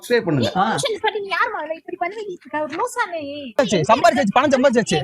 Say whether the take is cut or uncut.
cut